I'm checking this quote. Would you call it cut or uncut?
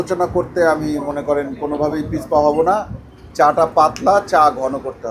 uncut